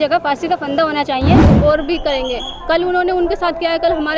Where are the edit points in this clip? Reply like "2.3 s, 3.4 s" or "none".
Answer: 1.5 s